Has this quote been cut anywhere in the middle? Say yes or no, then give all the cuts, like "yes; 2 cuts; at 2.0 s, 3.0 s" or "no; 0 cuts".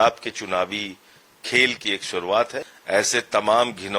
yes; 1 cut; at 2.6 s